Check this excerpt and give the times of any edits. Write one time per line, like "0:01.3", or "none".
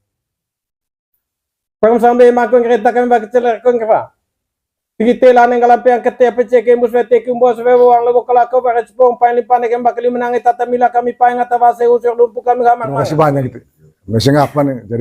0:13.1